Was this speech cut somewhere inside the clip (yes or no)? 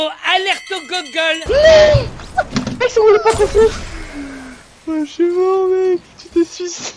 yes